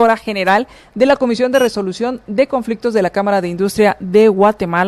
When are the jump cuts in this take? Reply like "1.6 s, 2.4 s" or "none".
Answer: none